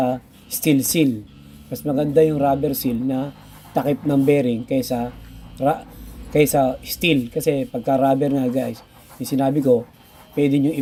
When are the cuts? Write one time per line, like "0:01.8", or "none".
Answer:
none